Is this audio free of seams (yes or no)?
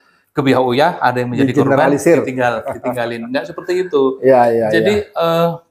yes